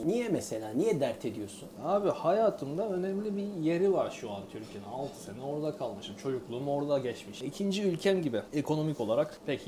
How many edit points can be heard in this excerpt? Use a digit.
2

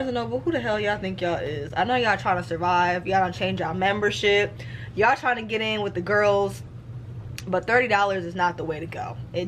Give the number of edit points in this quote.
0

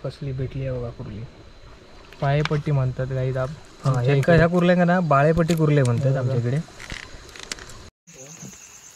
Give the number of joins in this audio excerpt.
1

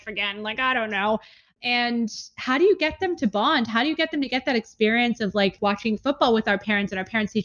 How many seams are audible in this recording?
2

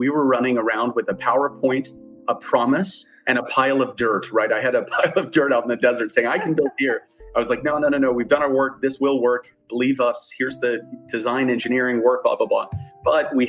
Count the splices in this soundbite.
1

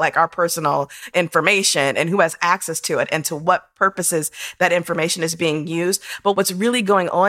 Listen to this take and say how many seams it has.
2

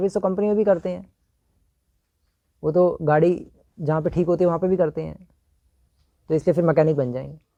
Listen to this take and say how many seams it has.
0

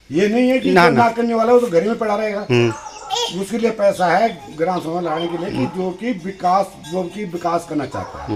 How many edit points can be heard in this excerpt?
0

